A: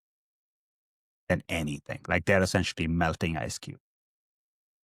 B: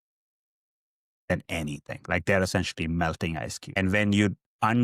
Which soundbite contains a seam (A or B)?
B